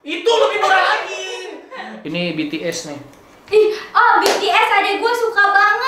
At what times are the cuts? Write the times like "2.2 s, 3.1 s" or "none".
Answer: 1.9 s